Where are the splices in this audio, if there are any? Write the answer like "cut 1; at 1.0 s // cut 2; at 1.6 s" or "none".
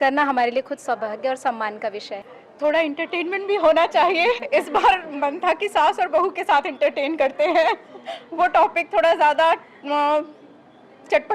cut 1; at 2.2 s